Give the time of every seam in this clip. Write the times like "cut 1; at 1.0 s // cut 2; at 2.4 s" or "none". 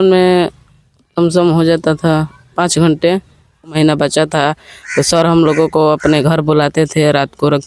cut 1; at 3.8 s